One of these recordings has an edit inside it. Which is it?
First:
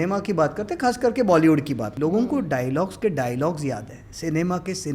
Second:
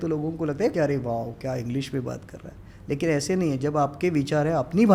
first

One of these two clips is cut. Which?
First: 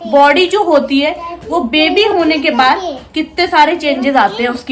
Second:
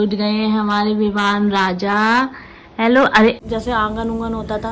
second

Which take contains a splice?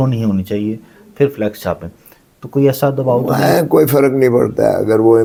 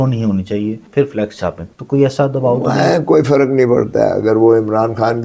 second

